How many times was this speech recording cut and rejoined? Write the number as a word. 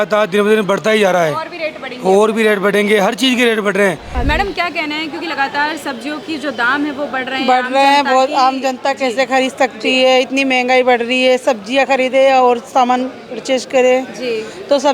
one